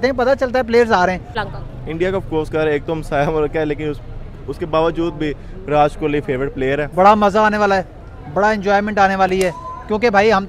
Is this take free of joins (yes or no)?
no